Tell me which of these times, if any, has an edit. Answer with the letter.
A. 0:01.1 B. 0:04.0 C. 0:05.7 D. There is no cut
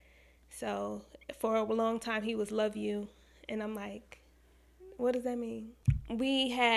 C